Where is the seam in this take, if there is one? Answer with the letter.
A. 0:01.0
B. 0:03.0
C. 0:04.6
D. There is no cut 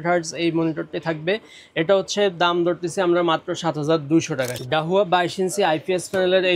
C